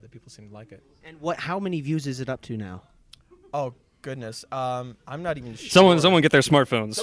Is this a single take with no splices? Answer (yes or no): yes